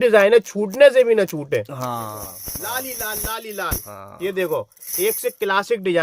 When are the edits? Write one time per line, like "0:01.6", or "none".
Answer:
0:01.9